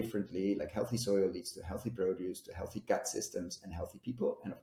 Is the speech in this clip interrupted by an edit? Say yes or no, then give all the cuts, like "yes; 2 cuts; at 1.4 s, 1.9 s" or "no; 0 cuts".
no; 0 cuts